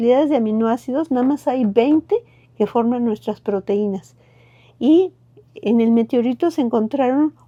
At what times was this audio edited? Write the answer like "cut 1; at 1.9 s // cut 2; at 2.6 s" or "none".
none